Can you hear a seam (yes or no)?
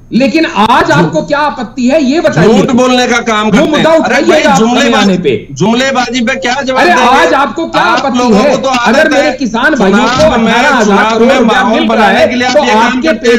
no